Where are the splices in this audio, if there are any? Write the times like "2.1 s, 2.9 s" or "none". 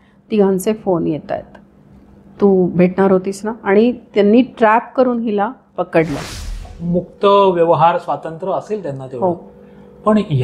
6.7 s